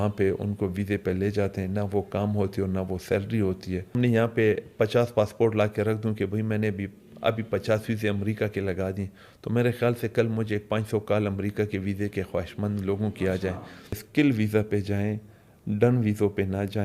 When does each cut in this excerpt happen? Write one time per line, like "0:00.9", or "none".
0:04.0
0:14.0

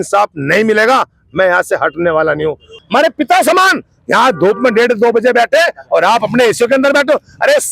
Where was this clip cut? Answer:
0:02.7

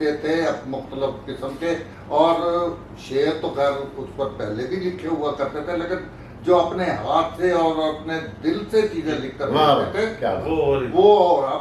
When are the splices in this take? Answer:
none

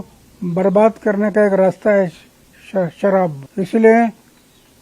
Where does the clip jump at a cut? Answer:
0:03.4

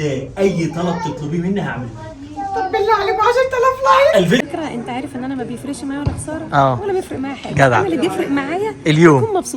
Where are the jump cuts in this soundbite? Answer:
0:04.4

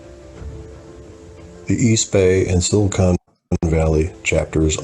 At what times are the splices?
0:03.4

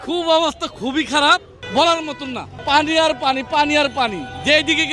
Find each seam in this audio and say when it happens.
0:01.6

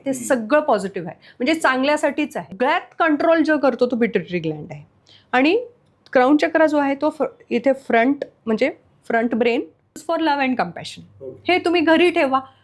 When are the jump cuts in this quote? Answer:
0:02.5
0:10.0

